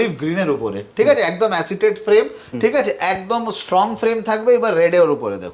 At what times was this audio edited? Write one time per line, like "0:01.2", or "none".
none